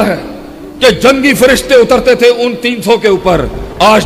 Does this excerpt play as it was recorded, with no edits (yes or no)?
yes